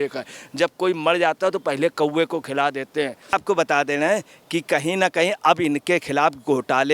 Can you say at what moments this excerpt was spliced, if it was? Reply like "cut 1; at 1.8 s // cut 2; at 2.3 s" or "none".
cut 1; at 3.3 s